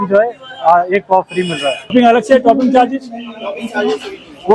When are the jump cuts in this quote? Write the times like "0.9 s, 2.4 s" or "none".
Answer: 1.9 s